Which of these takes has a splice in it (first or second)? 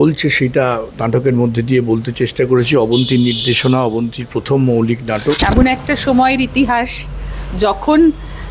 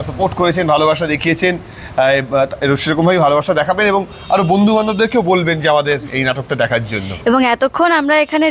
first